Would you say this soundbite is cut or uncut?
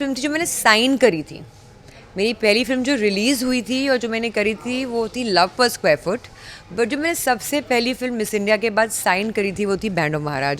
uncut